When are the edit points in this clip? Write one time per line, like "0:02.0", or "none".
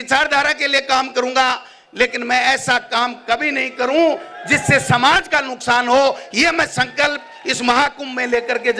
none